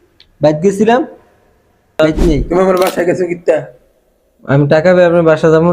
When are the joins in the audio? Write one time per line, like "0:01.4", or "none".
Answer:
0:02.4